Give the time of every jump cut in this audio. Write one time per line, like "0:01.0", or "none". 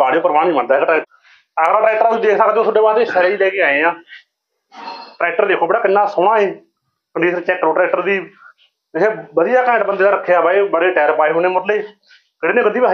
0:01.0